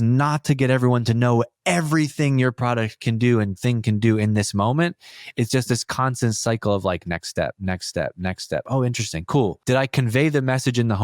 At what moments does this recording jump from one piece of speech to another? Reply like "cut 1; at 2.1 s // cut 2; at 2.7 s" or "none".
cut 1; at 9.6 s